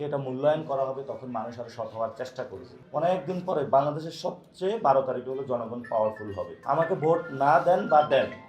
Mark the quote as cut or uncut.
cut